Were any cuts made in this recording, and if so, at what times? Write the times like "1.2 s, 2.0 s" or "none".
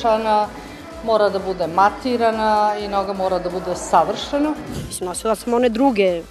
4.7 s